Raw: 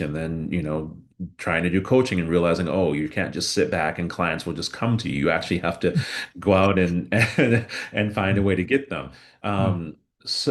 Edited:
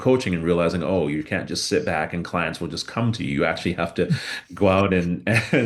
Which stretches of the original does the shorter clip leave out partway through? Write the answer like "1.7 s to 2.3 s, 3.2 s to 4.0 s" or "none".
none